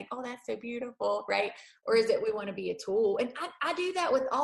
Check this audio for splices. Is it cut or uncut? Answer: uncut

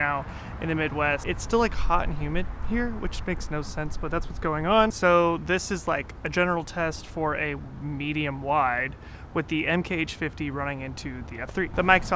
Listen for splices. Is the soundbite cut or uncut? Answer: cut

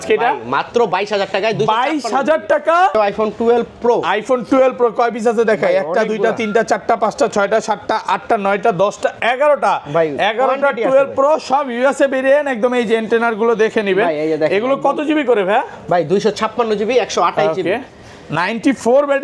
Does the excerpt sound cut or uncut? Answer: cut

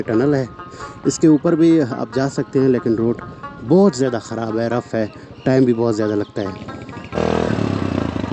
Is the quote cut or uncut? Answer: cut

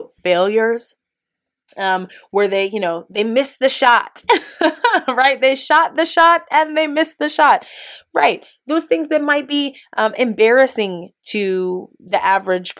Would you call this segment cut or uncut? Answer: uncut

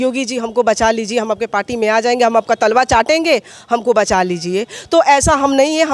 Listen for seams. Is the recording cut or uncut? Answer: uncut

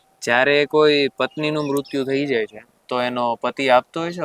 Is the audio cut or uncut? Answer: uncut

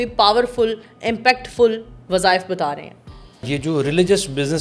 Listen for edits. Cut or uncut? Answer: cut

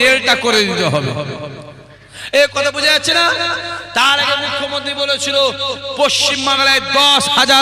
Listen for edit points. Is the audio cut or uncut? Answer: uncut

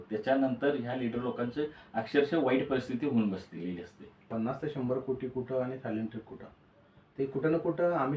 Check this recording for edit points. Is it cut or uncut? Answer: cut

